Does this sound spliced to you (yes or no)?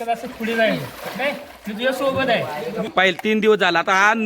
yes